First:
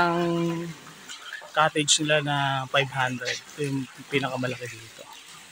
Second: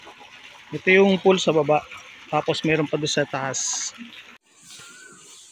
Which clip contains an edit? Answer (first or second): second